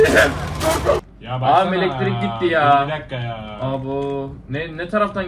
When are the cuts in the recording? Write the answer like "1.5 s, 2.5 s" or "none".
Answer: 1.0 s